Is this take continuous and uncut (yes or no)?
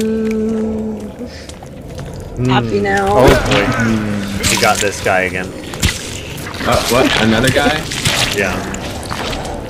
yes